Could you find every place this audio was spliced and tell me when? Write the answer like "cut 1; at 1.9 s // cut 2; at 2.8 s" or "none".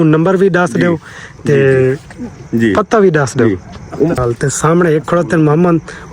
cut 1; at 4.2 s